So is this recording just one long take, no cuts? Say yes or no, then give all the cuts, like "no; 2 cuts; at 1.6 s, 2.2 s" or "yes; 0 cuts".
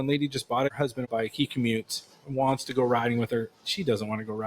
no; 1 cut; at 1.1 s